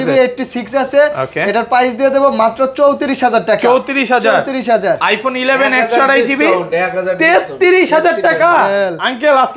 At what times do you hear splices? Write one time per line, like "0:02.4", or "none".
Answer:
none

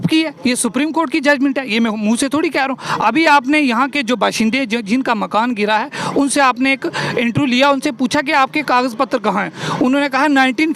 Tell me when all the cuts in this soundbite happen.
none

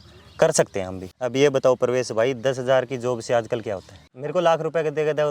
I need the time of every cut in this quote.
0:01.1
0:04.0

